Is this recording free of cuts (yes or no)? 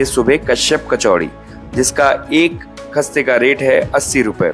yes